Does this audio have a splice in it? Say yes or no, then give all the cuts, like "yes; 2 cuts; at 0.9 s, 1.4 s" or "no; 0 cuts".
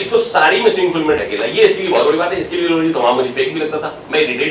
no; 0 cuts